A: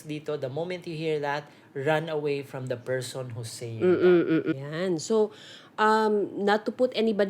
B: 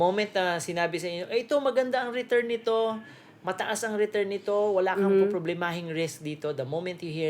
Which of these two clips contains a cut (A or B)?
A